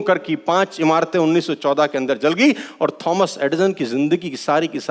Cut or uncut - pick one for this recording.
uncut